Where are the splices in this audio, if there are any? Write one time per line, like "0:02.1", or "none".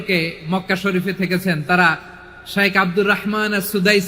none